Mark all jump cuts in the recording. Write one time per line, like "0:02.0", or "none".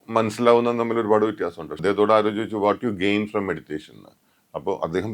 0:01.6